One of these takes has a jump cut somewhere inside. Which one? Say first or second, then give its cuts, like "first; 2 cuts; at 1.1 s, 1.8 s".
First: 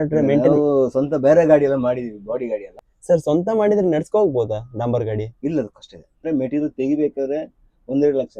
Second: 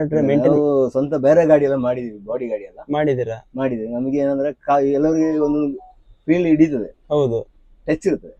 first; 2 cuts; at 2.7 s, 6.2 s